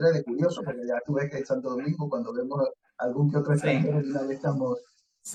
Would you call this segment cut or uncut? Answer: uncut